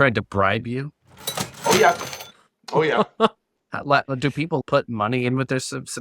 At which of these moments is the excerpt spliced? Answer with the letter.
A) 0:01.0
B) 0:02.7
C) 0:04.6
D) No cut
C